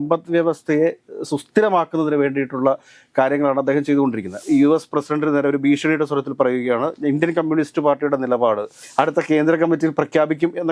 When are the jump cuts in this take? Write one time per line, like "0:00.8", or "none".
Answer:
0:04.4